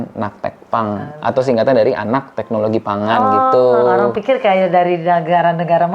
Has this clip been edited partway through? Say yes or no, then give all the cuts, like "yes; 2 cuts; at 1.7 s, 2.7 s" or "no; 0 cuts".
no; 0 cuts